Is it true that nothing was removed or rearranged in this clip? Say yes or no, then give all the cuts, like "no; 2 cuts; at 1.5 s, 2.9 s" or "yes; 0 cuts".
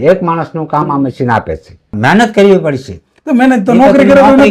no; 1 cut; at 2.0 s